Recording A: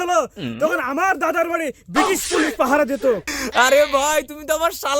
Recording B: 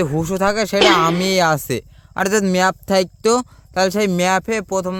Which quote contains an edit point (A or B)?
A